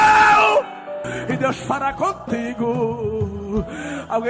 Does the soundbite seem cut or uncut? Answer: cut